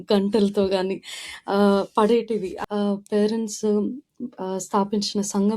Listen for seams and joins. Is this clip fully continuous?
no; 1 cut; at 2.5 s

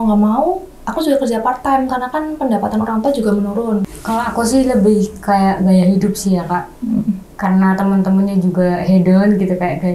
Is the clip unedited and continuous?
no; 1 cut; at 4.0 s

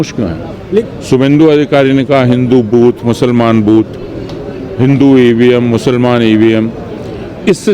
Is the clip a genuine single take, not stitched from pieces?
no; 1 cut; at 1.0 s

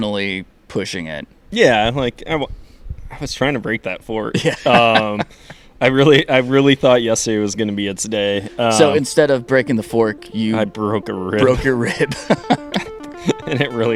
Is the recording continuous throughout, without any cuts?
yes; 0 cuts

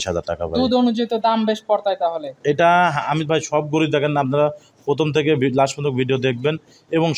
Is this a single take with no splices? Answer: yes; 0 cuts

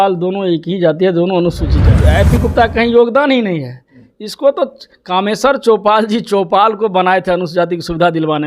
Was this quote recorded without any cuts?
no; 1 cut; at 2.0 s

